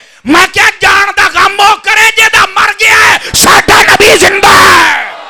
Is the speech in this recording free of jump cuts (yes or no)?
yes